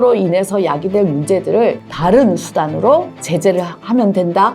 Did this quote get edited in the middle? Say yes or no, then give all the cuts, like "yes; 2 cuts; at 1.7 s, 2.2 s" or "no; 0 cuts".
no; 0 cuts